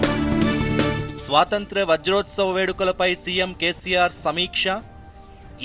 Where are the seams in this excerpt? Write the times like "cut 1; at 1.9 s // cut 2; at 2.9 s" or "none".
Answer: cut 1; at 1.1 s

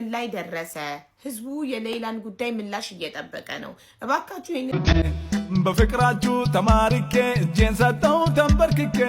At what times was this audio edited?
cut 1; at 4.7 s

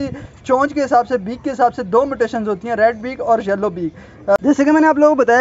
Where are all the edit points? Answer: cut 1; at 4.4 s

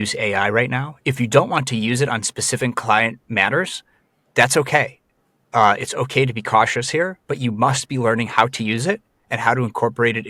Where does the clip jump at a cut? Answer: cut 1; at 0.9 s

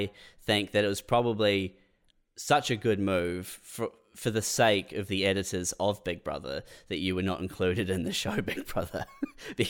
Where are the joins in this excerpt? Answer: none

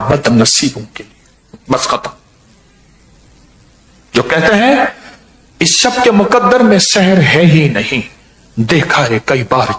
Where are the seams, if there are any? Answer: none

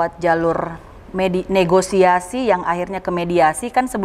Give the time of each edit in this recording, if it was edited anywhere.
none

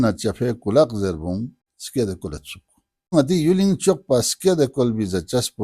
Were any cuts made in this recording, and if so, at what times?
cut 1; at 3.1 s

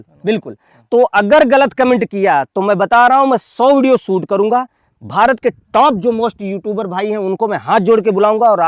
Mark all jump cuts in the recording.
none

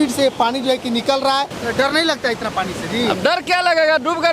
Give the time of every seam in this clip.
cut 1; at 1.5 s

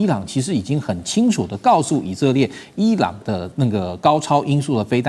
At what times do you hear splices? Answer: none

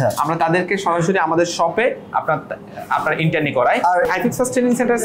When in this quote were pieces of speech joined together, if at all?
cut 1; at 4.1 s

